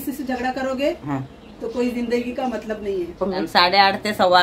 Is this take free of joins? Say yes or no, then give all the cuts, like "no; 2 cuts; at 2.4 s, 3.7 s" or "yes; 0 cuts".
no; 1 cut; at 3.4 s